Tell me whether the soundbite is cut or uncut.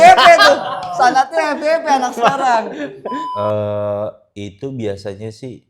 cut